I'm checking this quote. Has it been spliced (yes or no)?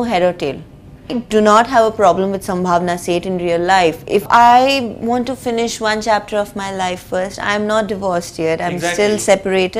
yes